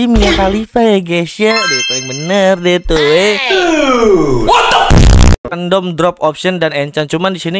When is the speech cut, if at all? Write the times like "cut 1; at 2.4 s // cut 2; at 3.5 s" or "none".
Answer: cut 1; at 5.5 s

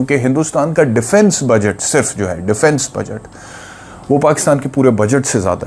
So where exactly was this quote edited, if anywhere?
none

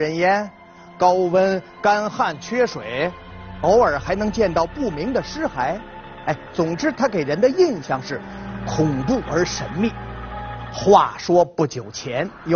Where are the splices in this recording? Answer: cut 1; at 4.5 s

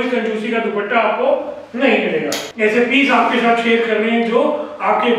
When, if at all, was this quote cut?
cut 1; at 2.4 s

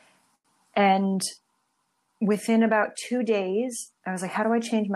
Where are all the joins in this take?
cut 1; at 3.9 s

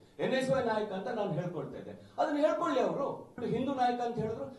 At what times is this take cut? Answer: cut 1; at 3.3 s

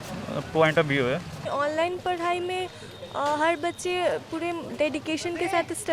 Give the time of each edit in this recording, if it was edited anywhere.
cut 1; at 1.4 s

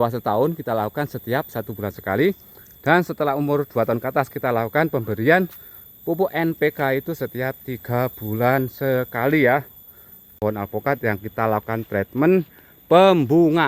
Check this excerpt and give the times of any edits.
cut 1; at 10.3 s

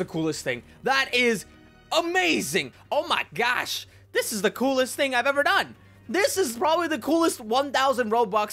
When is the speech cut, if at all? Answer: cut 1; at 2.8 s

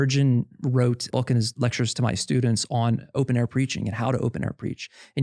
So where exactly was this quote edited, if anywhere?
cut 1; at 1.0 s // cut 2; at 3.1 s

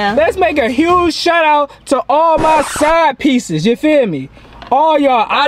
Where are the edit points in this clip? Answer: none

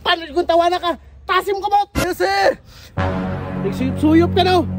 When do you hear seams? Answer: cut 1; at 2.0 s

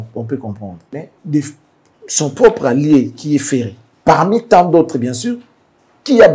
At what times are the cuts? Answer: none

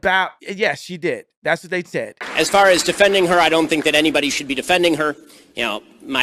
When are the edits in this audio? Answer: cut 1; at 2.2 s

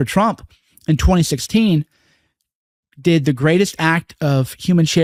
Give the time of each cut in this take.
none

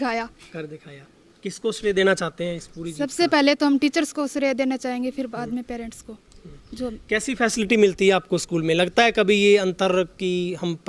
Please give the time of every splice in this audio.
none

